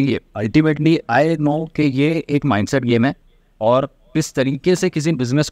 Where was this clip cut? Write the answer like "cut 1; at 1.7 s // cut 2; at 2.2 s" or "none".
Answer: none